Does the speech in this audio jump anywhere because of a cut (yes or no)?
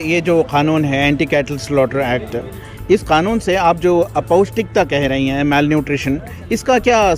no